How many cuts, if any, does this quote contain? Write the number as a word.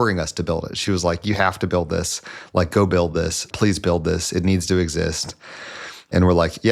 zero